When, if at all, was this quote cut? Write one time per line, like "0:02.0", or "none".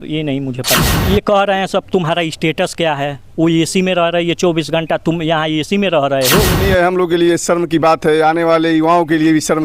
0:00.9
0:06.6